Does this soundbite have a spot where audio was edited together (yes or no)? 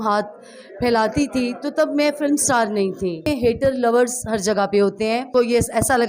yes